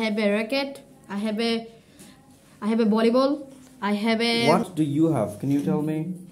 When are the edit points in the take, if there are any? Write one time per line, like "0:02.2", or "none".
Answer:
0:04.4